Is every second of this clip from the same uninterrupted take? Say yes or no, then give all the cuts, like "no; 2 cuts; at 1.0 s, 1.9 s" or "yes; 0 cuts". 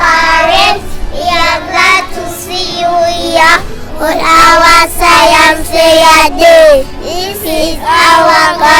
yes; 0 cuts